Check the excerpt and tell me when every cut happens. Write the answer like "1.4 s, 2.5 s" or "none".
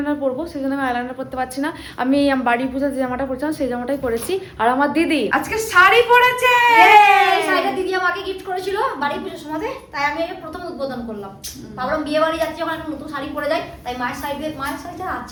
none